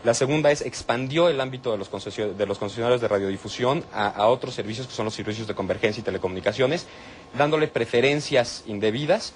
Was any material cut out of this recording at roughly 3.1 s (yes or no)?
no